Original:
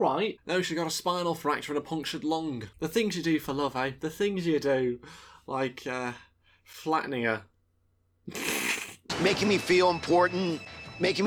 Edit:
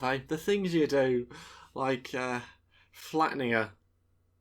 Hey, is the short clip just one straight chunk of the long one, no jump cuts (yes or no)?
yes